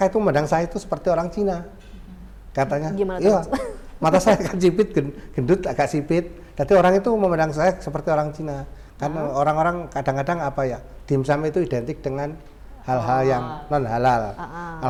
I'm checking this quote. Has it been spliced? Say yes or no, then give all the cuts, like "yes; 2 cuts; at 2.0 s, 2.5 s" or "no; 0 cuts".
no; 0 cuts